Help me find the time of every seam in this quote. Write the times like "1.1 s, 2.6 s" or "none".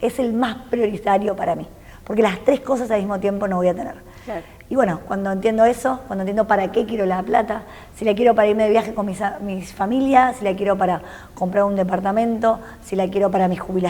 none